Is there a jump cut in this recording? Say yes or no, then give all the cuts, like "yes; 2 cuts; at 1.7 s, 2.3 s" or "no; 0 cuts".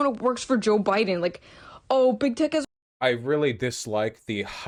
no; 0 cuts